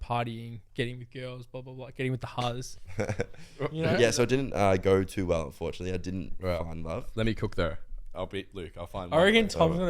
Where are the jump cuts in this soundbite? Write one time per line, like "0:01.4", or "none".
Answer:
0:03.9
0:08.1